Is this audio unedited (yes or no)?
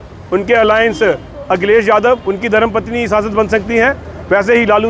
yes